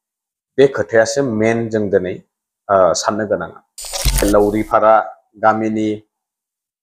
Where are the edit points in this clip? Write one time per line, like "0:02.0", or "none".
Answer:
0:04.2